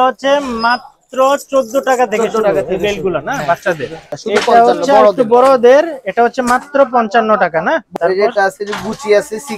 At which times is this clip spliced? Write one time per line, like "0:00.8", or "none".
0:04.1
0:07.9